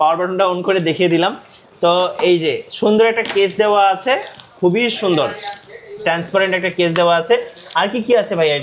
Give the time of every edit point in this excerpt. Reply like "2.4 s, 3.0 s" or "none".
none